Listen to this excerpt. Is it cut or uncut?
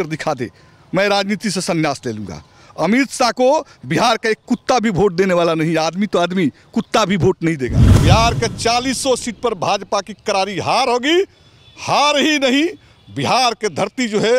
cut